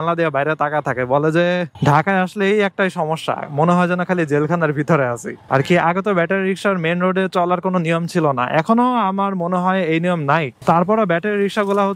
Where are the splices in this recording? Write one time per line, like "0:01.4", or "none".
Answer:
0:01.7
0:05.3